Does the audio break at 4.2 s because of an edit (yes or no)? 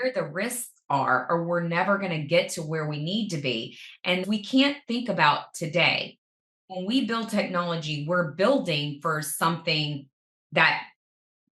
yes